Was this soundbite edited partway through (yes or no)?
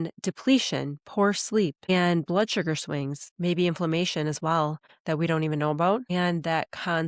yes